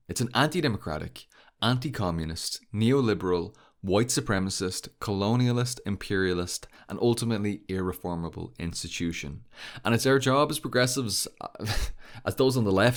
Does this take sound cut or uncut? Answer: uncut